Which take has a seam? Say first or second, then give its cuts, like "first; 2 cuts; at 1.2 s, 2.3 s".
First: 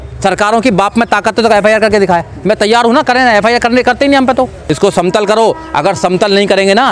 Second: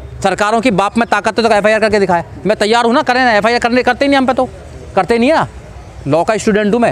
first; 1 cut; at 4.6 s